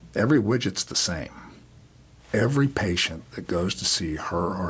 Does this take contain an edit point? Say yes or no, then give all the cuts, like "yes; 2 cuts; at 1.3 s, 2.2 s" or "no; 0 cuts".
yes; 1 cut; at 2.2 s